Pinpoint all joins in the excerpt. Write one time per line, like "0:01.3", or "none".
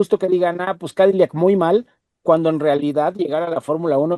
none